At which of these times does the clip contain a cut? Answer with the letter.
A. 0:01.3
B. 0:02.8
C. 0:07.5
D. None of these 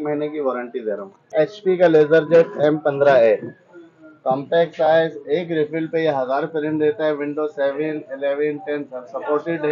A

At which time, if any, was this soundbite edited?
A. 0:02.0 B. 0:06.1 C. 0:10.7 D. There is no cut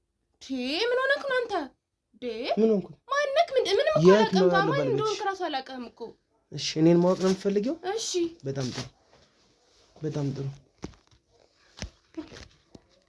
D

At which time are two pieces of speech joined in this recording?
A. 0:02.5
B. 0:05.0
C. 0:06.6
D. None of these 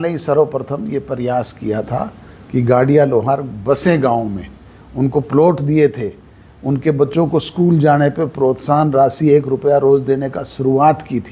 D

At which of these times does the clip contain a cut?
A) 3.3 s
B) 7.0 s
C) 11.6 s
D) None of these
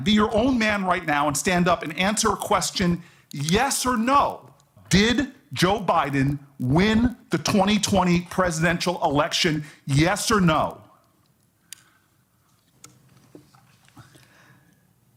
D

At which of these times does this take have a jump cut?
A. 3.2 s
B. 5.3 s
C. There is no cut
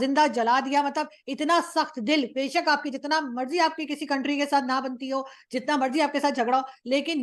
C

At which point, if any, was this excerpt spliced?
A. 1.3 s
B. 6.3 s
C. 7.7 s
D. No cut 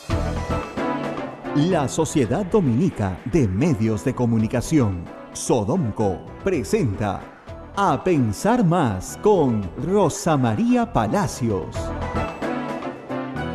A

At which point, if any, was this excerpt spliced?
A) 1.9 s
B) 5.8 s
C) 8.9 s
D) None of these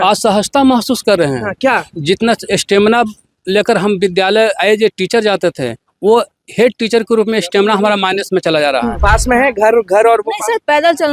C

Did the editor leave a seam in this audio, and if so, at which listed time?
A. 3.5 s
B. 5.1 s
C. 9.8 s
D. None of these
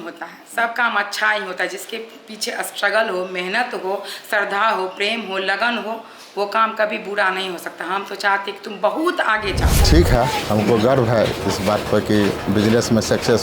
C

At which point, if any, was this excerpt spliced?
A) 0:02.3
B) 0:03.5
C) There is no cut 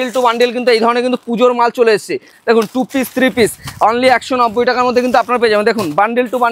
A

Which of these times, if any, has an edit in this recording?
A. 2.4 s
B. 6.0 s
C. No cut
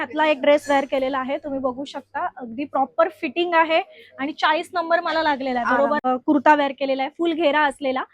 B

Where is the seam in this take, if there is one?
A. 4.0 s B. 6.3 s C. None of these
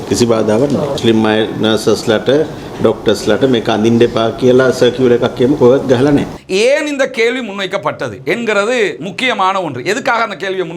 B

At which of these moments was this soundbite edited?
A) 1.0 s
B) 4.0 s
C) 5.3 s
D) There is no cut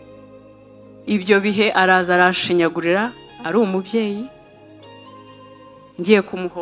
A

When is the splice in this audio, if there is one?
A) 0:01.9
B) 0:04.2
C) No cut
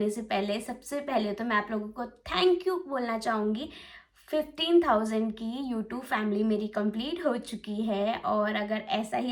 C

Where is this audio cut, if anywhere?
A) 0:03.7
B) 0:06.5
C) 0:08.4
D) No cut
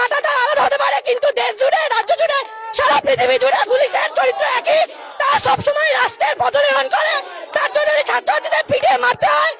D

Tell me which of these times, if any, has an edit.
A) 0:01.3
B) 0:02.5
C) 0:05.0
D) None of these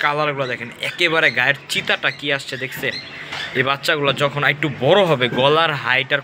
D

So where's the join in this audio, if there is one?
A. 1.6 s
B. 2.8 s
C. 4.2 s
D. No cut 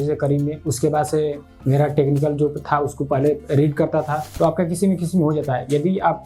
C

